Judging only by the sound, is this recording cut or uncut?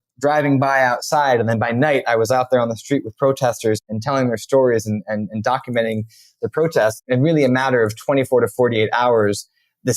cut